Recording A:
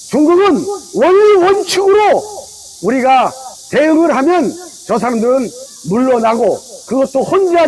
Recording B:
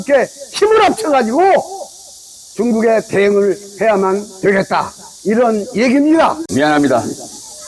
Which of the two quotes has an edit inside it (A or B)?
B